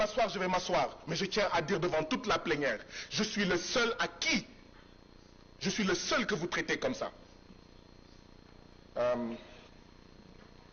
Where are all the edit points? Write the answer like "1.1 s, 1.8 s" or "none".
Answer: none